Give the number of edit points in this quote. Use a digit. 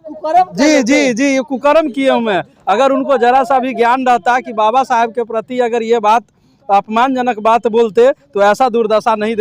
0